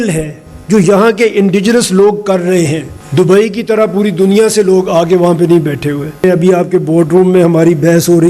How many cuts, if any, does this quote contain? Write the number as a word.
two